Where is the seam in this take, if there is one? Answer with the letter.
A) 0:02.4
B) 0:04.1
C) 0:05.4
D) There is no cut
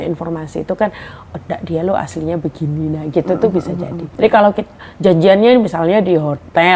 B